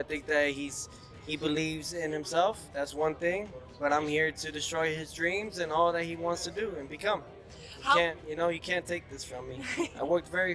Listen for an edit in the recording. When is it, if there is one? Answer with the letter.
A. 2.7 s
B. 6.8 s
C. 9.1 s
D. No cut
D